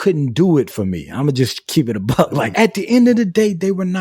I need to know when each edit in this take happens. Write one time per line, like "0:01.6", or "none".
0:02.5